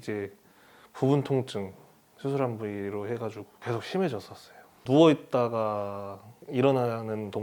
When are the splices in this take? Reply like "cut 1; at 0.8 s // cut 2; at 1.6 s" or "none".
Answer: cut 1; at 4.8 s